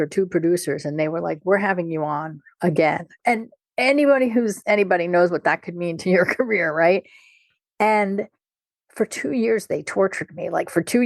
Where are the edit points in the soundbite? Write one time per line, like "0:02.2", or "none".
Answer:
0:03.2